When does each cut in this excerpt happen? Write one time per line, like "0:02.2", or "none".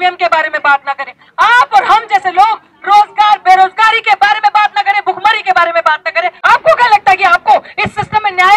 0:06.4